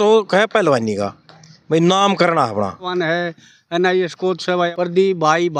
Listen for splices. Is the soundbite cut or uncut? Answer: cut